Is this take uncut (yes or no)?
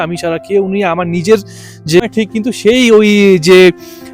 no